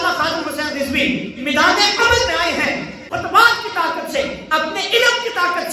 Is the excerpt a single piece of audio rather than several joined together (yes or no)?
no